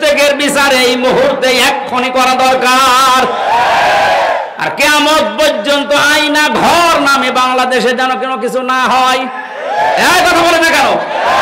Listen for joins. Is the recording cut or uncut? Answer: uncut